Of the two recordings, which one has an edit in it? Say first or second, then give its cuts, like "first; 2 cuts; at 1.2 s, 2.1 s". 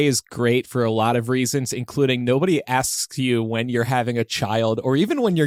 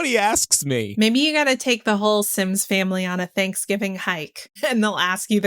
second; 2 cuts; at 0.9 s, 4.4 s